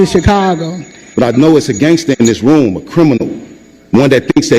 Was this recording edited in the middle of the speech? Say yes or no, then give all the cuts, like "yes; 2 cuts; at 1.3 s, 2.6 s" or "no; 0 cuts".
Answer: yes; 1 cut; at 1.1 s